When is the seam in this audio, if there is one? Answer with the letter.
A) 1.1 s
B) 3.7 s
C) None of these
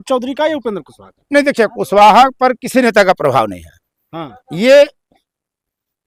C